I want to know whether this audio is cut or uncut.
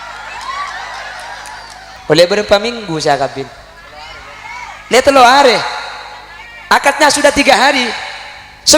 cut